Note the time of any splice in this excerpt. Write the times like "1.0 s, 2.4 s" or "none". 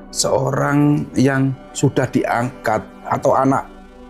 none